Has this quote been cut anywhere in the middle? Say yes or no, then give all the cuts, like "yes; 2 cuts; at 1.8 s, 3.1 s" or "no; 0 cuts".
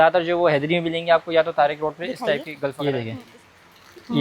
yes; 1 cut; at 2.8 s